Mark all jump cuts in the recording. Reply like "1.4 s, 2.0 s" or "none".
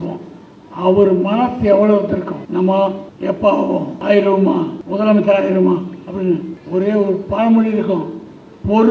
2.4 s, 3.1 s, 3.9 s, 4.8 s, 6.5 s